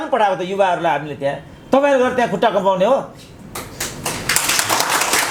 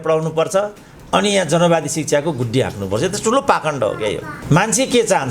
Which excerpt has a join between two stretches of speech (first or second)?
second